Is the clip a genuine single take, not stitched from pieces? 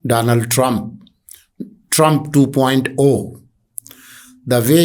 yes; 0 cuts

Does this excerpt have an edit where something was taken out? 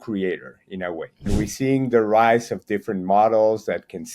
yes; 1 cut; at 1.2 s

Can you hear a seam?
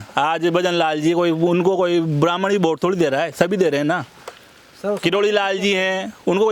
no; 0 cuts

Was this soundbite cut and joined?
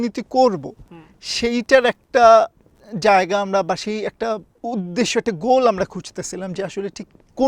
yes; 1 cut; at 4.5 s

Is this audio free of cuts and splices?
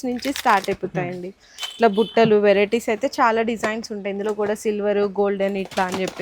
yes; 0 cuts

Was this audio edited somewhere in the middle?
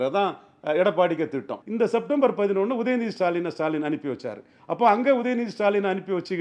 yes; 1 cut; at 1.6 s

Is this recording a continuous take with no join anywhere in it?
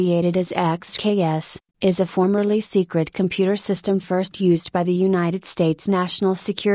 yes; 0 cuts

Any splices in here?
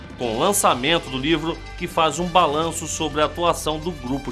no; 0 cuts

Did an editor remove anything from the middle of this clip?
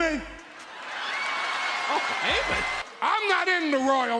yes; 1 cut; at 2.8 s

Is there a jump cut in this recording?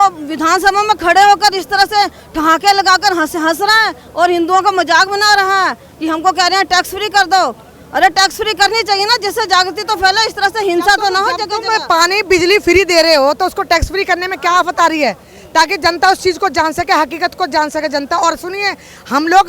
no; 0 cuts

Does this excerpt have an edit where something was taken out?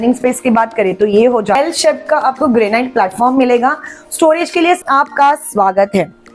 yes; 2 cuts; at 1.6 s, 4.8 s

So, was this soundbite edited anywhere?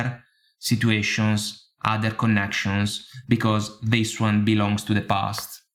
no; 0 cuts

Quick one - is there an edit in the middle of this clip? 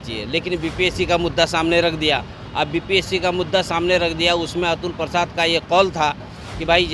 no; 0 cuts

